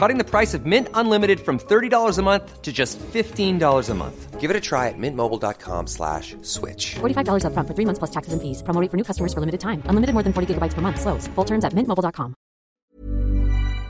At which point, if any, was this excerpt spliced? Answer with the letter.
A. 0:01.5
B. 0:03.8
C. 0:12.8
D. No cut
C